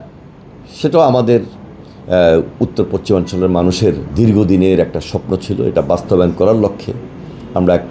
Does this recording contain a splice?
no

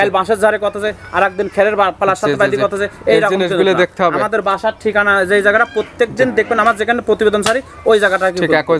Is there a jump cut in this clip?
no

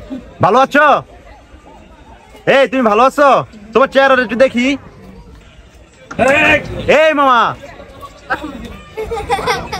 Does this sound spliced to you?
no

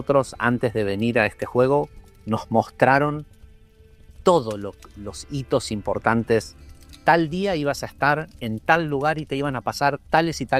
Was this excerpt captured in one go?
yes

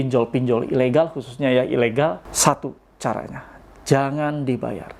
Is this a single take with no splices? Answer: no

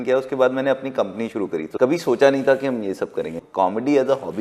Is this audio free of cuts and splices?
no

